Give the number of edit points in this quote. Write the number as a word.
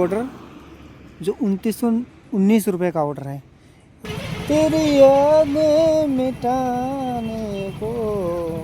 one